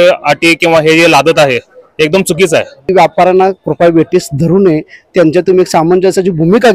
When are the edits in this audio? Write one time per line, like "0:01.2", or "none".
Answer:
0:02.9